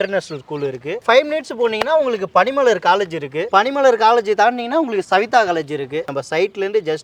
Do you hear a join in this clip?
yes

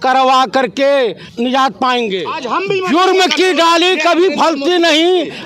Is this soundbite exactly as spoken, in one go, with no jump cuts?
no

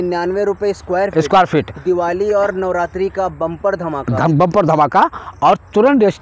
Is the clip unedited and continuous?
yes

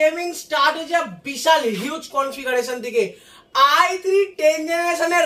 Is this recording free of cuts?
yes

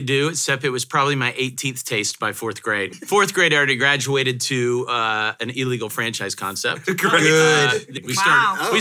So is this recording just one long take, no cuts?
no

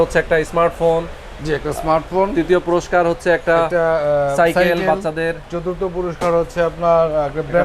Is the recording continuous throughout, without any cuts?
yes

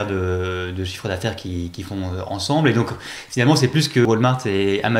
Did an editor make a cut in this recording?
yes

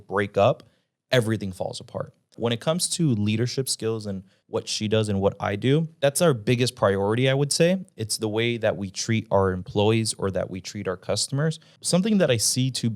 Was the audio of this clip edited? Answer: yes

